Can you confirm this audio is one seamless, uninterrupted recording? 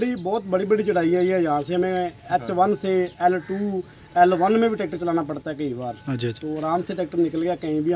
yes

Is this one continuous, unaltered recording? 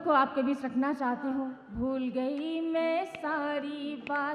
no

